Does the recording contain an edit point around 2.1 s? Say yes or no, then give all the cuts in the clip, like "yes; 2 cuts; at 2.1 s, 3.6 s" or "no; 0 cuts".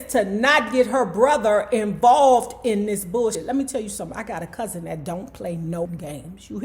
no; 1 cut; at 3.4 s